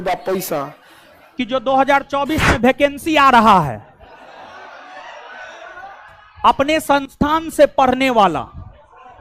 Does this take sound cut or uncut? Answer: cut